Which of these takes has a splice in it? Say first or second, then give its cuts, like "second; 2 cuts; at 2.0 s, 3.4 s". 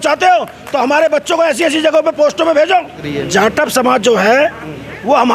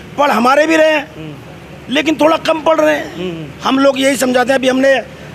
first; 1 cut; at 3.1 s